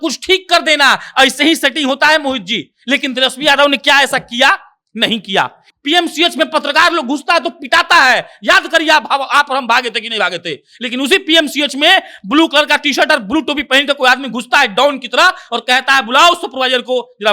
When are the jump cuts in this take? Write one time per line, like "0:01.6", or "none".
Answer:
0:05.6